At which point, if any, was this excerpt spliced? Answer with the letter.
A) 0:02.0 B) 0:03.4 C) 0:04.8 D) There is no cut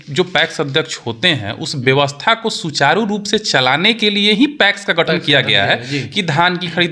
D